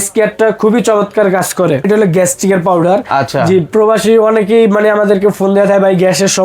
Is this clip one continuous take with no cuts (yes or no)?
no